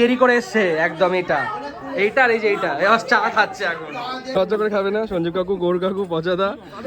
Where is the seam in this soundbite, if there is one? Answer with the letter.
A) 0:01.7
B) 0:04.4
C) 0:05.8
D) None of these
B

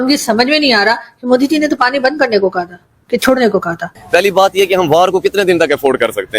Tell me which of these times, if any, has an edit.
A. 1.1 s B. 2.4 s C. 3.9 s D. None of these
C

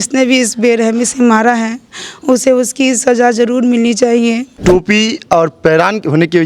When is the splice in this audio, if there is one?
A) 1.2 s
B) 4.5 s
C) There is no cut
B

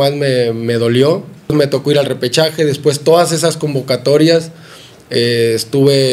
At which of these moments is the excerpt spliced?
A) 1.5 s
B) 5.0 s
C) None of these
A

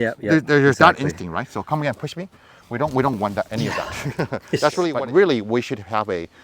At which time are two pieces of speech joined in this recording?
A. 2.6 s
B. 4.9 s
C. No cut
B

